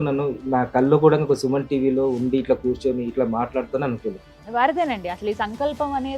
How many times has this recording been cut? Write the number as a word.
one